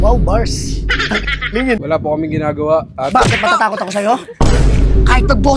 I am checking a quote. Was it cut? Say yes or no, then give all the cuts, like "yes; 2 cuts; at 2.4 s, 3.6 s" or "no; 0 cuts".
yes; 1 cut; at 1.8 s